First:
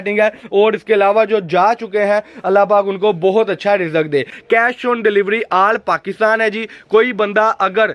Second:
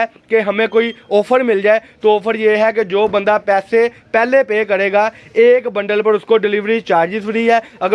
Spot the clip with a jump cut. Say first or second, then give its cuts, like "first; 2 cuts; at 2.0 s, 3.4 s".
first; 1 cut; at 4.3 s